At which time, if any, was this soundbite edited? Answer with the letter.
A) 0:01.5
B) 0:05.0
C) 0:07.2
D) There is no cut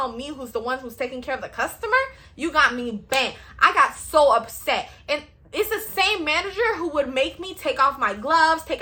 D